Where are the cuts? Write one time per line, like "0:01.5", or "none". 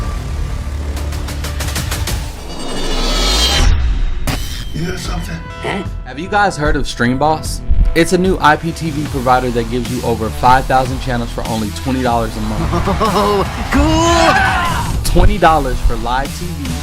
0:02.4